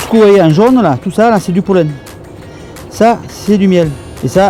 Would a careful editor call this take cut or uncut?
uncut